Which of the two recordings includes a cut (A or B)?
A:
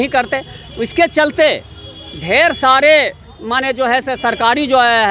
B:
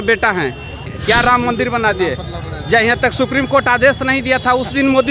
B